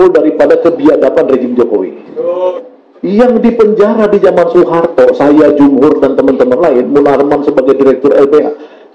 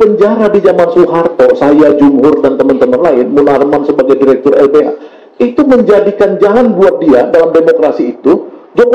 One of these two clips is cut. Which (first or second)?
first